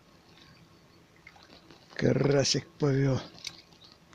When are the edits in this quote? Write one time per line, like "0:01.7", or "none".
0:01.5